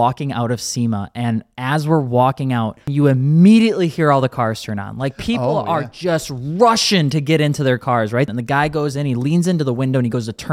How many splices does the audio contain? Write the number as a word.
two